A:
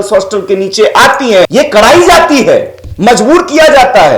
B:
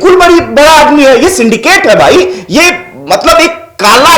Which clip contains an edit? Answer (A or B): A